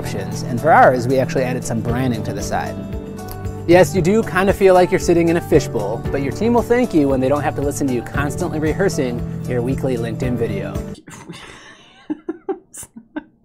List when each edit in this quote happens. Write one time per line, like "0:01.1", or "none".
0:11.1